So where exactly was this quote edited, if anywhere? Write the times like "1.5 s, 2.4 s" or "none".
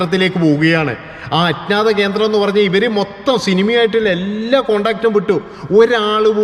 none